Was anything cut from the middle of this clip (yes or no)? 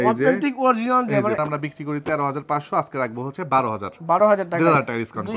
yes